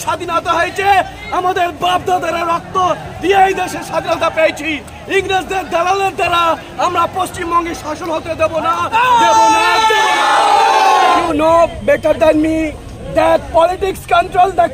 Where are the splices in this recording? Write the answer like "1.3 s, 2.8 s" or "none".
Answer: 11.2 s